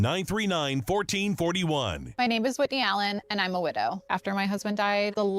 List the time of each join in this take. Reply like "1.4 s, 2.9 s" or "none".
2.1 s